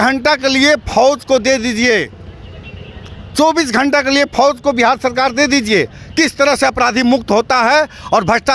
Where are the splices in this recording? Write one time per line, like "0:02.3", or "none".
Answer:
none